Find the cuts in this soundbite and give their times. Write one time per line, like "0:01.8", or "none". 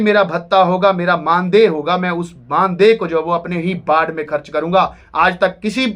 none

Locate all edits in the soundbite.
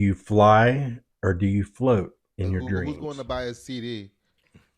0:02.8

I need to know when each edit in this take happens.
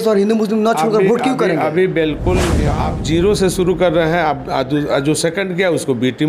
0:02.7

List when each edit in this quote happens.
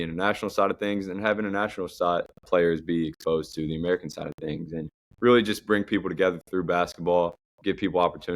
0:02.4
0:05.0
0:07.5

